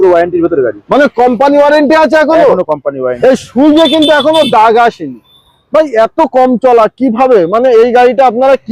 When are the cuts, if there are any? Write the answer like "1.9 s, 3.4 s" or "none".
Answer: 3.1 s